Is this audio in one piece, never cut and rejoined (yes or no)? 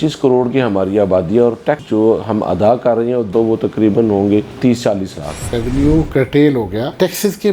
no